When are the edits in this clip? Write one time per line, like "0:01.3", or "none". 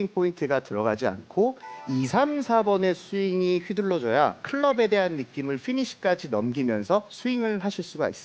0:04.4
0:07.1